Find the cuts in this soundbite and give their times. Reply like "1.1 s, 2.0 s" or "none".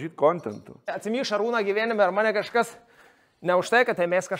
0.9 s